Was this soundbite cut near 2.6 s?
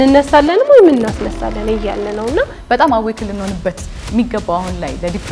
yes; 1 cut; at 2.6 s

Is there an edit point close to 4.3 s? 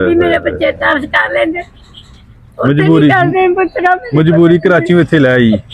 no; 0 cuts

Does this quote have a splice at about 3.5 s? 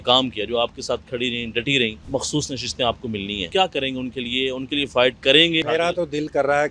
yes; 2 cuts; at 3.5 s, 5.6 s

